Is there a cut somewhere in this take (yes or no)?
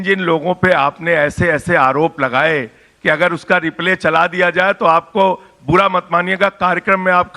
no